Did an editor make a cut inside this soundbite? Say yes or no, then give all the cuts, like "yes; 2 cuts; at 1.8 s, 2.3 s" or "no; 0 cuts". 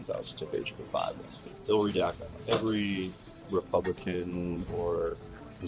yes; 1 cut; at 1.4 s